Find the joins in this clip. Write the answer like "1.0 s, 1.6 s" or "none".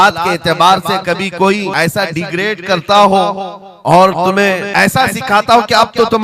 1.7 s, 4.7 s